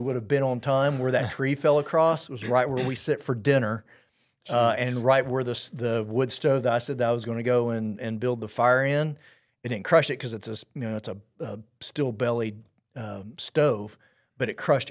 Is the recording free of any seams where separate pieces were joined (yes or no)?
yes